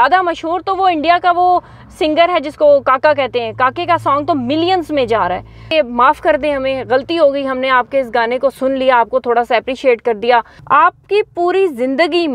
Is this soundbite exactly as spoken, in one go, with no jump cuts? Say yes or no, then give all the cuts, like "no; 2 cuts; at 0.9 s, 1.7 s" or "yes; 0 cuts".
no; 2 cuts; at 5.7 s, 10.6 s